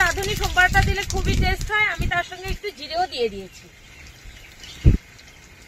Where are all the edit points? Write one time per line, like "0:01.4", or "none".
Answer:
none